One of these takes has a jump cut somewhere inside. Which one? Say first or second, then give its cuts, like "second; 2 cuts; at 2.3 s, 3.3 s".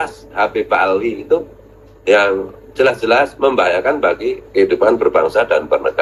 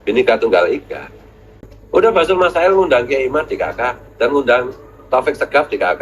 second; 1 cut; at 1.6 s